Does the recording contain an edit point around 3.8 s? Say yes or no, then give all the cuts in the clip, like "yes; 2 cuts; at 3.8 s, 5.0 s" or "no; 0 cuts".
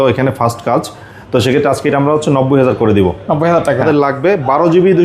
yes; 1 cut; at 3.8 s